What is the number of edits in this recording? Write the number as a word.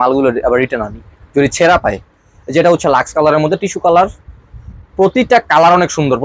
zero